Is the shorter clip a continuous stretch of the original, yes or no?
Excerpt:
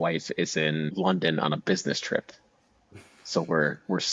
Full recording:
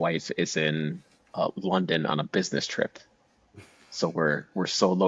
no